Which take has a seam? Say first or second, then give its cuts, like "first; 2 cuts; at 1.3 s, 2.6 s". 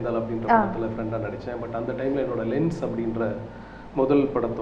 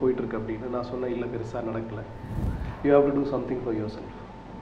second; 1 cut; at 2.5 s